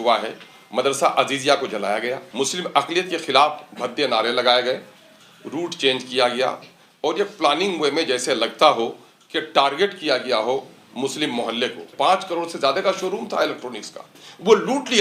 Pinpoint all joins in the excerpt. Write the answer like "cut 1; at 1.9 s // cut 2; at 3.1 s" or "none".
cut 1; at 2.2 s // cut 2; at 11.9 s